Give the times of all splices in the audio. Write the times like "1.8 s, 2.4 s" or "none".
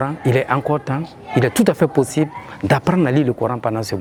none